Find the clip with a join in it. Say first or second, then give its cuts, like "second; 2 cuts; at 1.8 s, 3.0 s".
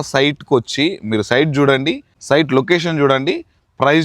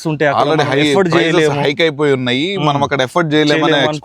first; 1 cut; at 2.1 s